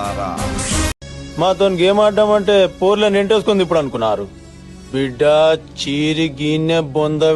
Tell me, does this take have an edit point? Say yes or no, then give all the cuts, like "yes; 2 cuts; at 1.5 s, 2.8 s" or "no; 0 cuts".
yes; 1 cut; at 1.0 s